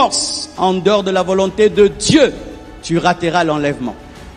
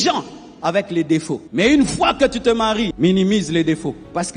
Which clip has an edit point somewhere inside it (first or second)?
second